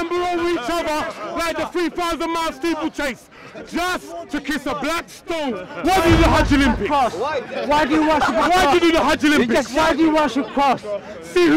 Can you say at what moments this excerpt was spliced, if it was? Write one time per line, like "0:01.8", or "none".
0:05.7